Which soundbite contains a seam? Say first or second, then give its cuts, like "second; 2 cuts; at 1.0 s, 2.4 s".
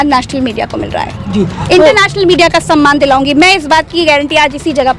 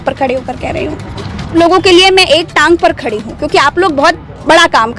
second; 1 cut; at 1.5 s